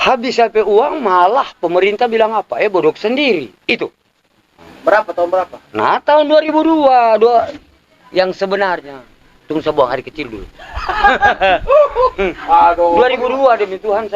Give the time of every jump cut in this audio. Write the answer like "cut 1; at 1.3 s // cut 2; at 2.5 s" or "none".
cut 1; at 4.7 s